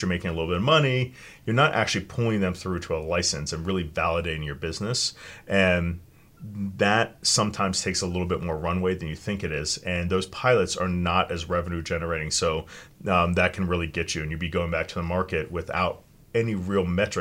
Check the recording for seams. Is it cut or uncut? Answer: cut